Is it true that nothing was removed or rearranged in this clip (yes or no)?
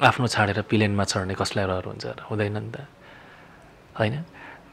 yes